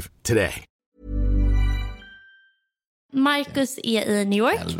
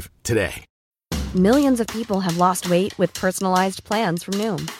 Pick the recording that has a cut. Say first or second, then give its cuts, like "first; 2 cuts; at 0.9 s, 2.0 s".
first; 2 cuts; at 1.0 s, 3.0 s